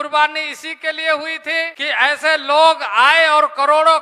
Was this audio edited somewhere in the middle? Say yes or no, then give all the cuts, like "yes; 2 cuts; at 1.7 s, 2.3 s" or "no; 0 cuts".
yes; 1 cut; at 1.8 s